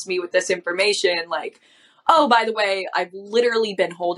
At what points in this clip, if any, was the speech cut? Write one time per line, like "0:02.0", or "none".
none